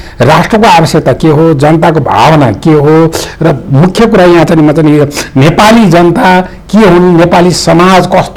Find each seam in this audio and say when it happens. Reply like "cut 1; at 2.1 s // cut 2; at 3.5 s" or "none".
none